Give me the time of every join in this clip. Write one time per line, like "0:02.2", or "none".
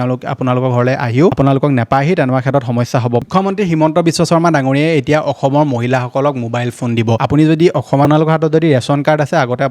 0:01.3
0:03.2
0:07.2
0:08.0